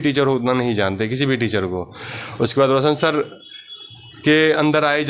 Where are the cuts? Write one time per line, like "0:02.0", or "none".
none